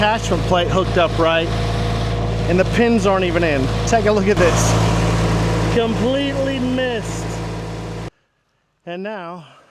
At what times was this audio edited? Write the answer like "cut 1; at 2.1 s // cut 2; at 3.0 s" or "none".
cut 1; at 8.1 s